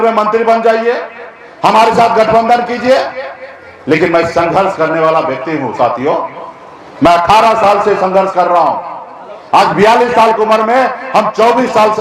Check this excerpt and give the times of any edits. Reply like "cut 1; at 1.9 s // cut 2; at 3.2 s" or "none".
none